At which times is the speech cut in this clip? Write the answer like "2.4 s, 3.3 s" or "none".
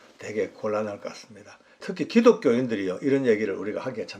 1.8 s